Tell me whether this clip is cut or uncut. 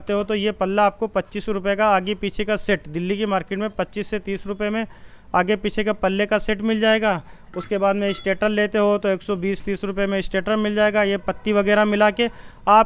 uncut